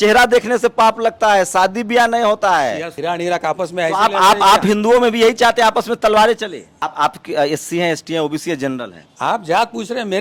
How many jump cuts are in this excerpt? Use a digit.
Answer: 2